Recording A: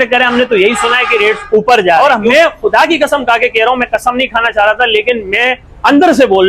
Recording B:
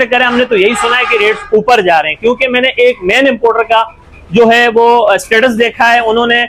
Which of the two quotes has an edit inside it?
A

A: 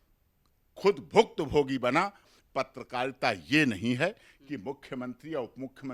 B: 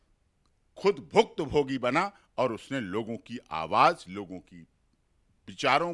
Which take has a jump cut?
A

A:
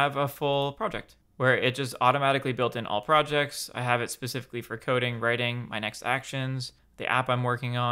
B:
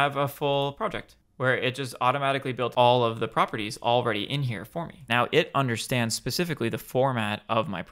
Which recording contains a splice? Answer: B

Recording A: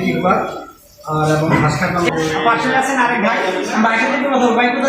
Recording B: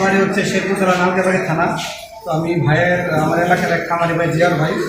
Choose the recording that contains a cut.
A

